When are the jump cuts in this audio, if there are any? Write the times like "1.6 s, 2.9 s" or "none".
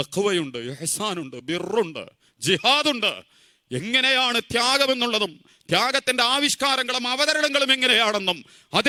none

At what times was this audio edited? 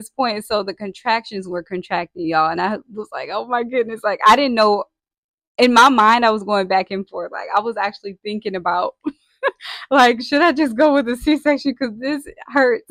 none

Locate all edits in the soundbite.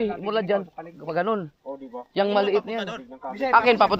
none

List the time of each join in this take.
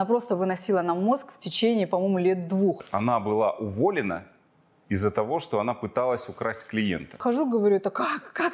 2.8 s, 7.2 s

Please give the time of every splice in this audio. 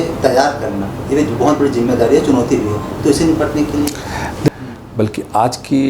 4.5 s

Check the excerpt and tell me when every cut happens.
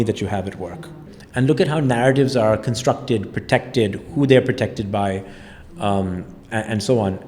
1.1 s

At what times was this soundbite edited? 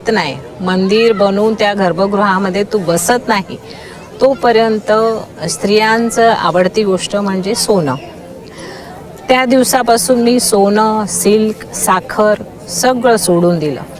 none

